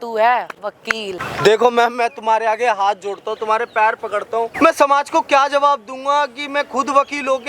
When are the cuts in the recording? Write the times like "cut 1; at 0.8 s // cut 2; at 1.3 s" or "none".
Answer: cut 1; at 1.3 s // cut 2; at 4.5 s